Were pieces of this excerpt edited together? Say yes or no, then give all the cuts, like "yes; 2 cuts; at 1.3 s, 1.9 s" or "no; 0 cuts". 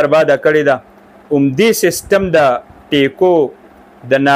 no; 0 cuts